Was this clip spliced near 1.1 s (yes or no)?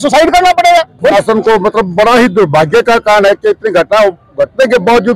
yes